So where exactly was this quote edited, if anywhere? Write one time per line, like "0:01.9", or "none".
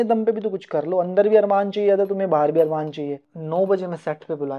0:03.3